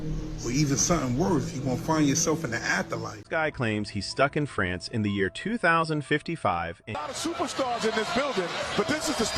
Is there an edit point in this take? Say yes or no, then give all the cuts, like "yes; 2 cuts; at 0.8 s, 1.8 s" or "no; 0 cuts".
yes; 2 cuts; at 3.1 s, 7.0 s